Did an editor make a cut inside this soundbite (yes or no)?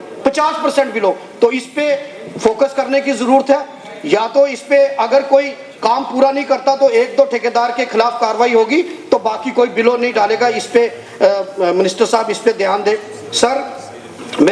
no